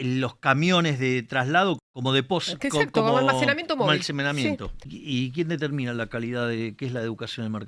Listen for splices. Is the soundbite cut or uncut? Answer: cut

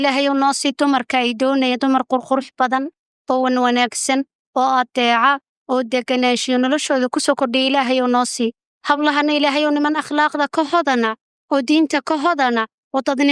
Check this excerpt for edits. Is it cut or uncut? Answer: uncut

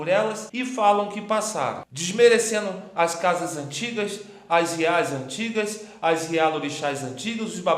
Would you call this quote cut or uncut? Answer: uncut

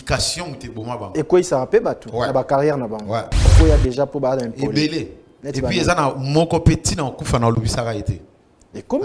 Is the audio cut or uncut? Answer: cut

